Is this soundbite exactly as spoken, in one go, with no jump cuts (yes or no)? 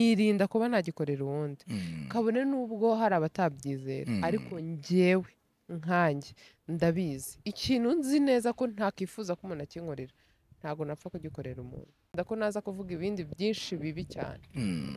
no